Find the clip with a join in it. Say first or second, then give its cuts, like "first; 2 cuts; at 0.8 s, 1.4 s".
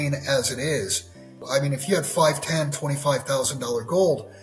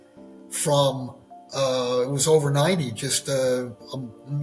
first; 1 cut; at 1.4 s